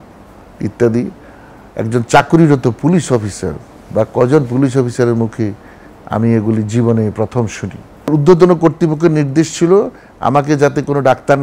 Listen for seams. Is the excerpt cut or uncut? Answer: cut